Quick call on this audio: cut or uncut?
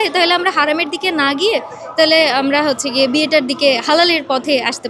uncut